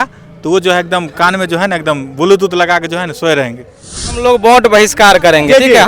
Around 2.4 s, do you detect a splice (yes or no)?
no